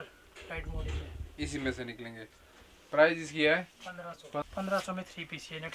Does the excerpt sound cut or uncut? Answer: cut